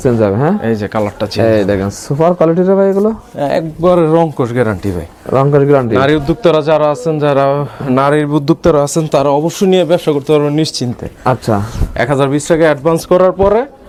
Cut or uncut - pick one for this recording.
uncut